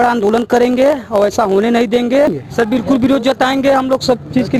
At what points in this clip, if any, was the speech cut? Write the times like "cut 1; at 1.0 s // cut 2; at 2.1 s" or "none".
cut 1; at 2.4 s